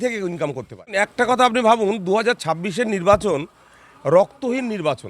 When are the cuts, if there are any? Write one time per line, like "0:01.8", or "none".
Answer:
0:01.0

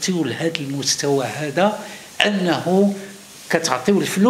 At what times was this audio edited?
none

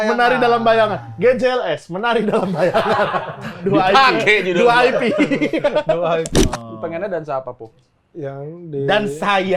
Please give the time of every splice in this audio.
0:06.3

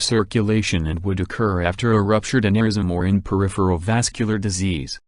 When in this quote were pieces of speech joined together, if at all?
0:03.4

